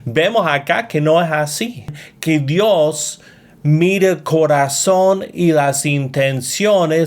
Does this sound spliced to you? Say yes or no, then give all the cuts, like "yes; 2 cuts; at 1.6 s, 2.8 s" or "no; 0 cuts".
yes; 1 cut; at 1.9 s